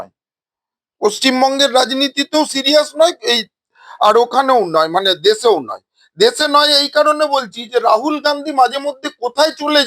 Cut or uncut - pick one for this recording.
uncut